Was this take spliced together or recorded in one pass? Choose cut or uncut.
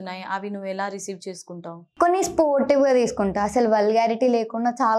cut